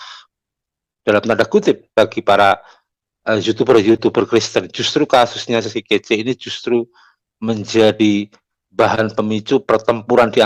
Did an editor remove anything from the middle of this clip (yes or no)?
no